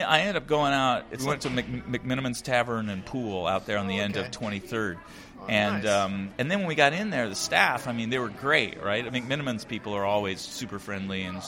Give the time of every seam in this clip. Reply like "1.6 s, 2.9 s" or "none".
1.2 s, 6.3 s